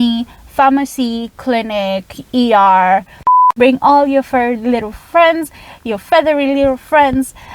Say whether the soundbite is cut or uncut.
cut